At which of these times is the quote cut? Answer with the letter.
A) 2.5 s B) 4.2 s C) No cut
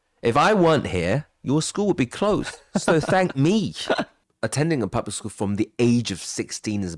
B